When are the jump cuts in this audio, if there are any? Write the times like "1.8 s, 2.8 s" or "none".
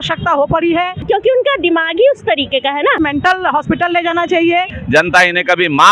1.0 s, 3.0 s, 4.8 s